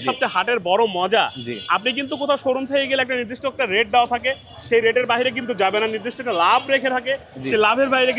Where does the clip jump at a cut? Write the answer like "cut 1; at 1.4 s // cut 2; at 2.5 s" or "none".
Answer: none